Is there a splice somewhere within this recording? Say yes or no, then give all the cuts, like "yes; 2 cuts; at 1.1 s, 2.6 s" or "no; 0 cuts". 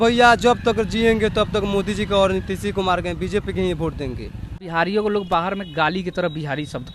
yes; 1 cut; at 4.6 s